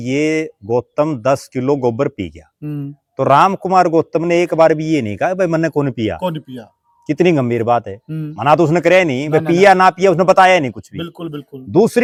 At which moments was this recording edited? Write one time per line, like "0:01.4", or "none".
none